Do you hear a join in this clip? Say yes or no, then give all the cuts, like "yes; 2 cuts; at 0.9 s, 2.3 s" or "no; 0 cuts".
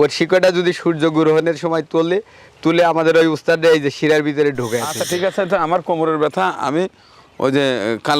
yes; 1 cut; at 5.0 s